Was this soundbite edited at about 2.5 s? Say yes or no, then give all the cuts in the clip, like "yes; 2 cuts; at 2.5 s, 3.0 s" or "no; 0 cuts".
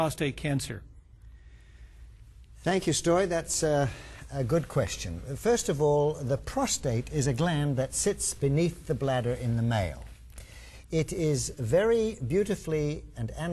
yes; 1 cut; at 2.5 s